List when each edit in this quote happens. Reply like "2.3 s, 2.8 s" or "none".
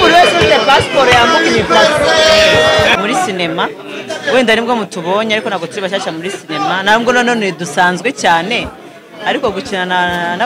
2.9 s